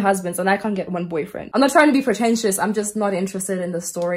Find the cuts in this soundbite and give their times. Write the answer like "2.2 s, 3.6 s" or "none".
1.5 s